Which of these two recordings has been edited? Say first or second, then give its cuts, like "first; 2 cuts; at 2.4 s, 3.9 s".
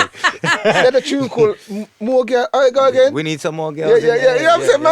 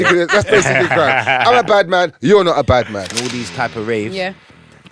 second; 1 cut; at 3.1 s